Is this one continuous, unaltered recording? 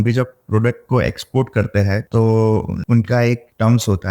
no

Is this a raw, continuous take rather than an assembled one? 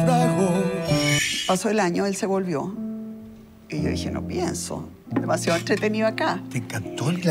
no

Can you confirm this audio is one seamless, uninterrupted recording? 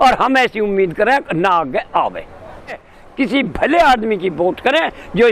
no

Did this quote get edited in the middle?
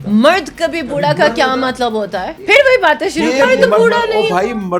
yes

